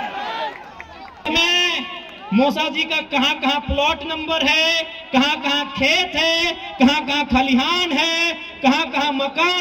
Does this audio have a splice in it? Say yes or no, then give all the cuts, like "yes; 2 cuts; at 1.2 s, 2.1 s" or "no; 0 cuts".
yes; 1 cut; at 1.3 s